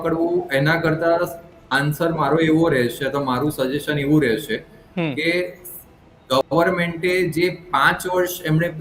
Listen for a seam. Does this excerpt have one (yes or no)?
no